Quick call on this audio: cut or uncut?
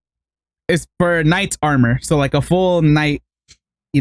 uncut